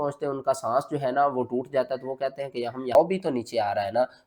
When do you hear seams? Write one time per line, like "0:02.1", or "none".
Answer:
0:02.9